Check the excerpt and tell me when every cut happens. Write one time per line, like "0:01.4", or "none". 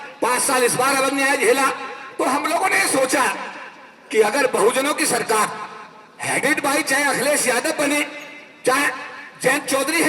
none